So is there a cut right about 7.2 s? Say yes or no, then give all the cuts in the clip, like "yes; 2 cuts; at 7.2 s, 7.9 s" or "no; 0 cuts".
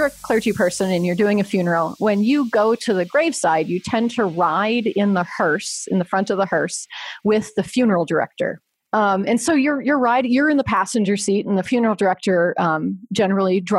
no; 1 cut; at 8.7 s